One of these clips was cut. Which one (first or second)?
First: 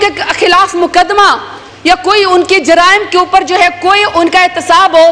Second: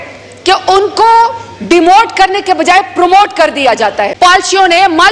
second